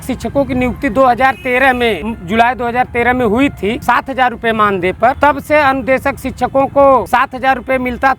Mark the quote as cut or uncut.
cut